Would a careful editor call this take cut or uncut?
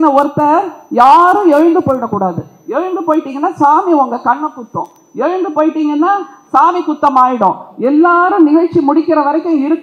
uncut